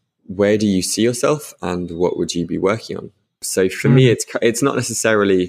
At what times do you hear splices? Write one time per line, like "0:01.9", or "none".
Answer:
0:03.4